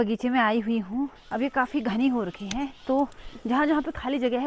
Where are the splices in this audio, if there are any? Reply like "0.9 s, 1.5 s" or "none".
1.2 s